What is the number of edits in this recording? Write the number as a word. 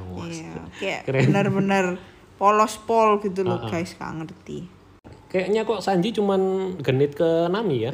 one